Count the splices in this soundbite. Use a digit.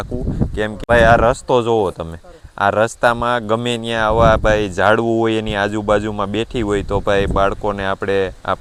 0